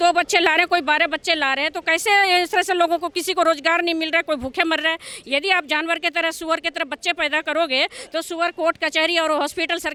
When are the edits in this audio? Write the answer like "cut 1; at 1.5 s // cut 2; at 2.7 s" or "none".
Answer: none